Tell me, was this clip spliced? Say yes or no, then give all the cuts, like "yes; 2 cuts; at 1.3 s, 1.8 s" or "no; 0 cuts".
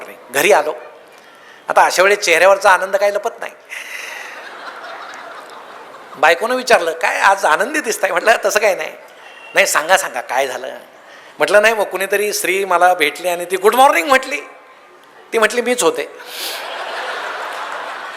no; 0 cuts